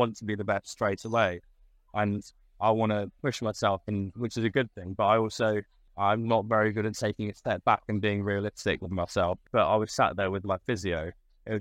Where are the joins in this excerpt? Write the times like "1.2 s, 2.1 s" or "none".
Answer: 5.8 s, 9.4 s

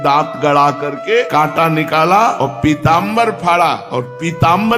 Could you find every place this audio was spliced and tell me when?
1.3 s, 2.4 s, 3.8 s

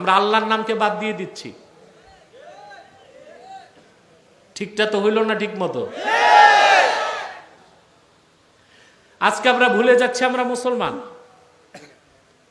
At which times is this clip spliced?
none

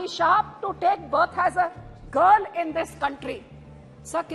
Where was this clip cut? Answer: none

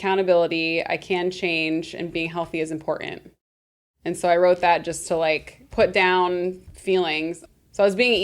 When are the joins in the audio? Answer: 5.6 s, 6.7 s, 7.4 s

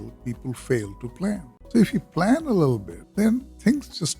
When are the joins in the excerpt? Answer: 1.5 s, 3.0 s

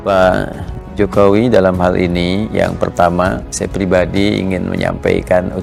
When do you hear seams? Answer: none

